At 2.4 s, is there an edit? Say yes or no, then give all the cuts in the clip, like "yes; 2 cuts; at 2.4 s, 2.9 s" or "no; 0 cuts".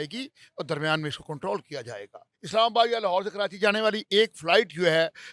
yes; 1 cut; at 2.4 s